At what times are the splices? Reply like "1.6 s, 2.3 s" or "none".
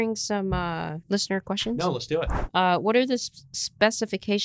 1.0 s, 2.4 s